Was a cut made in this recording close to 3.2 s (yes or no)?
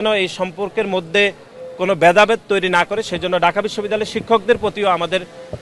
no